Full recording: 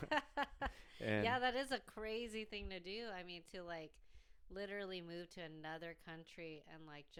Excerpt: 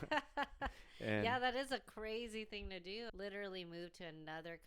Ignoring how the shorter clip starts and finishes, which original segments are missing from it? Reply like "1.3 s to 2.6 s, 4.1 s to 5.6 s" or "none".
3.1 s to 4.5 s